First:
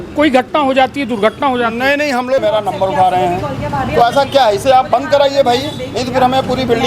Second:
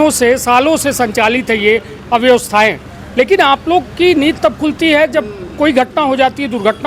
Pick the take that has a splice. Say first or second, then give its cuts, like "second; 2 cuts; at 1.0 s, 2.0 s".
first; 1 cut; at 2.4 s